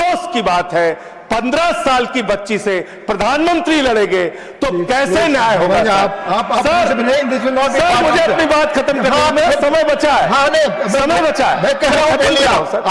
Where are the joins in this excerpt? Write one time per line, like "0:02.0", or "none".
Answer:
none